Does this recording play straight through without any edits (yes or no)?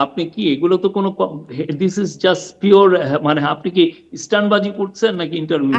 yes